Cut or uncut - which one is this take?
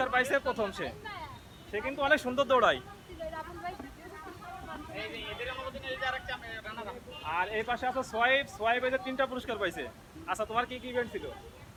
uncut